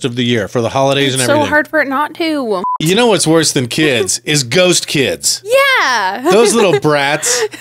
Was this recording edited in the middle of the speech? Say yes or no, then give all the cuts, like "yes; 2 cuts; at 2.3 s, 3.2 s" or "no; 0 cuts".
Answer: yes; 1 cut; at 2.8 s